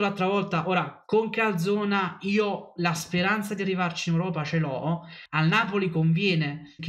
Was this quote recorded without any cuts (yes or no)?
no